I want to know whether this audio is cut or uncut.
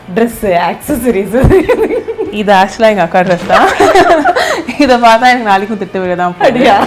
uncut